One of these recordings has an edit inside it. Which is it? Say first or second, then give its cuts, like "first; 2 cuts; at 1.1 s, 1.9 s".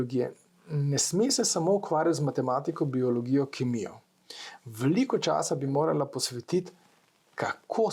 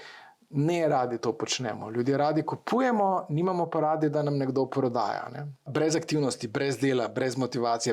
second; 1 cut; at 5.7 s